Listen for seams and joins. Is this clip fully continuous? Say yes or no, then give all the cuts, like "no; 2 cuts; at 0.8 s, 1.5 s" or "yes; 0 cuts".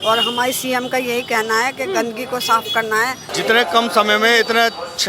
no; 1 cut; at 3.3 s